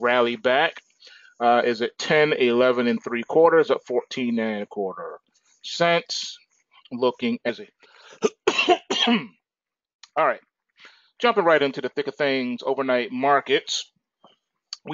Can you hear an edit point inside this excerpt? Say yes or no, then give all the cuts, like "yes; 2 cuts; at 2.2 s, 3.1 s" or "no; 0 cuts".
no; 0 cuts